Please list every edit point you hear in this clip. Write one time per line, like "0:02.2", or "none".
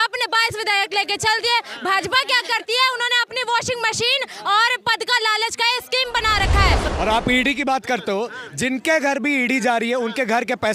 0:06.9